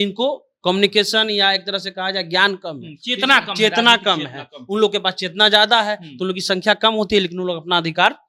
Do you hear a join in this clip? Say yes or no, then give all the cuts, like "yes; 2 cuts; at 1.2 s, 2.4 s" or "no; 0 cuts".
no; 0 cuts